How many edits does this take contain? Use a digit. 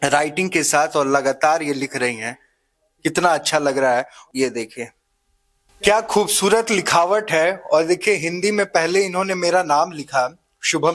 0